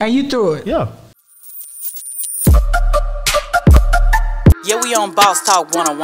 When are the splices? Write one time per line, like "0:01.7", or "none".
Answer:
0:01.1